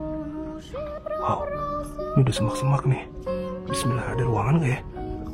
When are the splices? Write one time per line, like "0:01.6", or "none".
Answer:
none